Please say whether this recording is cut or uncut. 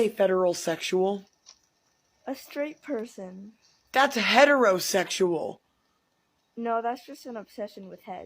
cut